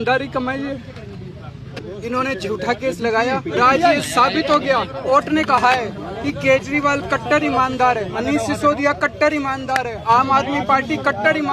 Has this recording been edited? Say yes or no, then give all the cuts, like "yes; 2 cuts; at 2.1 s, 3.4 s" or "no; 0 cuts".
yes; 6 cuts; at 1.8 s, 3.6 s, 5.1 s, 6.1 s, 8.1 s, 10.0 s